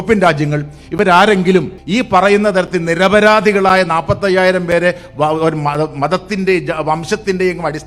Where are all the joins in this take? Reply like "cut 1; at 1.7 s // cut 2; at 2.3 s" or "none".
cut 1; at 1.8 s